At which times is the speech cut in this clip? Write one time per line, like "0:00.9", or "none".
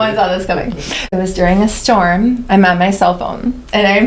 0:01.1